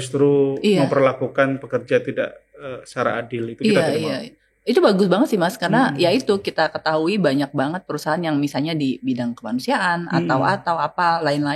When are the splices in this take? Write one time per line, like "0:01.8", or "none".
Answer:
none